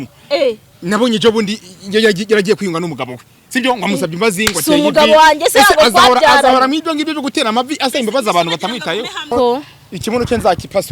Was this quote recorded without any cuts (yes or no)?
no